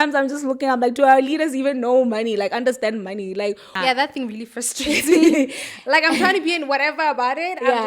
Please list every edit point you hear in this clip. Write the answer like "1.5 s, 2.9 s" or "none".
3.7 s